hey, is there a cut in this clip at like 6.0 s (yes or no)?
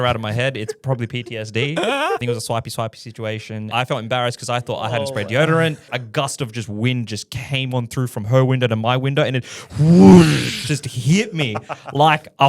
yes